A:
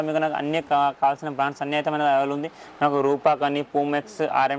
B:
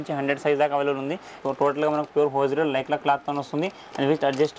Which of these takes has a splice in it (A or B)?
B